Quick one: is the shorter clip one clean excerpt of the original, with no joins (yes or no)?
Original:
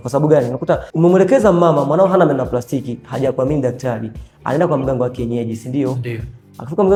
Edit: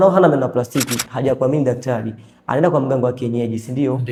yes